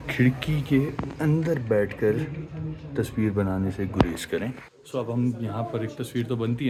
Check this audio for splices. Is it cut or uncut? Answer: uncut